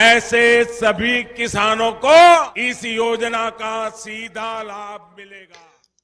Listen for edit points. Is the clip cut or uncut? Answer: uncut